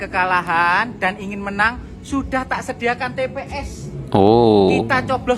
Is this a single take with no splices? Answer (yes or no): yes